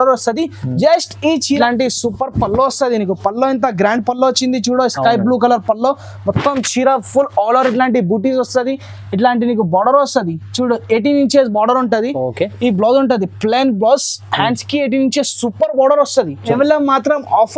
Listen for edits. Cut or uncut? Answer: cut